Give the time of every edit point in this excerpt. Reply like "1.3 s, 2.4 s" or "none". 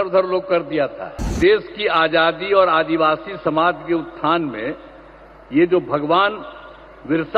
1.3 s